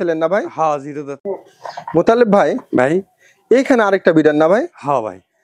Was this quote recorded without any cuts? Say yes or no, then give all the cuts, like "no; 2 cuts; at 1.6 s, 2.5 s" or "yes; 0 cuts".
no; 1 cut; at 1.2 s